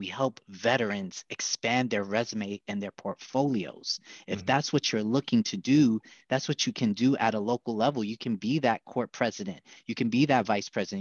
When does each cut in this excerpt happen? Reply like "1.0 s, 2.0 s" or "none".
none